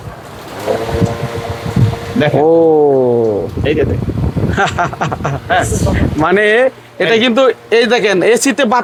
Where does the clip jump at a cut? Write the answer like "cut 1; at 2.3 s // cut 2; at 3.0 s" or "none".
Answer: none